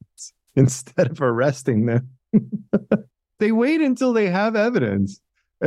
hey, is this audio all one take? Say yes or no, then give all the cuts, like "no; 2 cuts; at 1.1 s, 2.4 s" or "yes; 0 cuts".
no; 1 cut; at 3.3 s